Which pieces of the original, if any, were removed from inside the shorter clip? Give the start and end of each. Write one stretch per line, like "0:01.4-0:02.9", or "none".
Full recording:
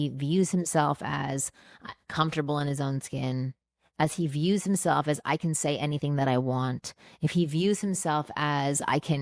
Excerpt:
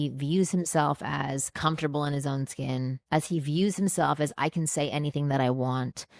0:01.5-0:02.0
0:03.5-0:03.8